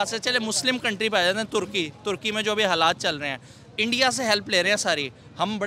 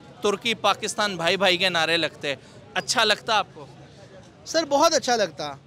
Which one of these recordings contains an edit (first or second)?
first